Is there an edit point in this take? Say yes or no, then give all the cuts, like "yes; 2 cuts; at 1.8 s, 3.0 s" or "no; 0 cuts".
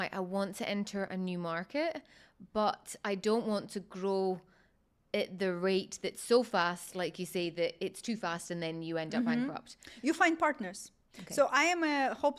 no; 0 cuts